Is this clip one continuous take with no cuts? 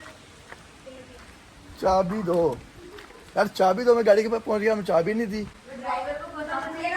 yes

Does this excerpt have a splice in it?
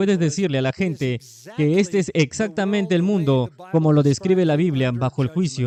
no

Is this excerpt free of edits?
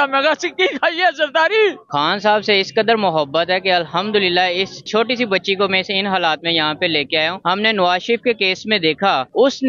no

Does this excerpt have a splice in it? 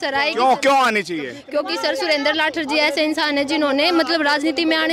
no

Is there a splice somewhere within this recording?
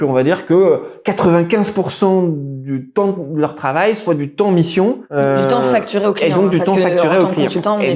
no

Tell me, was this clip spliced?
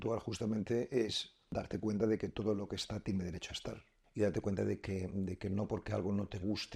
yes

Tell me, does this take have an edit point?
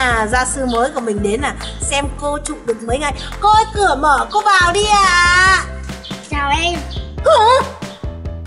no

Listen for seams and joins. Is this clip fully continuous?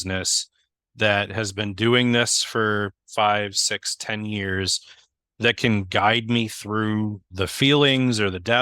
no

